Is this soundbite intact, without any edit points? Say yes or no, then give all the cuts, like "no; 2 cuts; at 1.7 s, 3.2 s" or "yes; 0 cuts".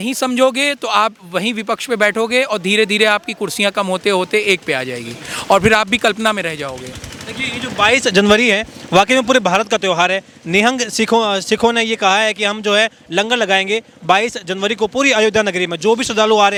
yes; 0 cuts